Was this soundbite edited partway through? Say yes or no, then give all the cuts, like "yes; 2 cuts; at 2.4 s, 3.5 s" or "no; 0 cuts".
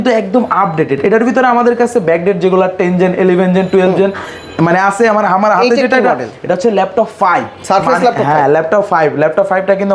no; 0 cuts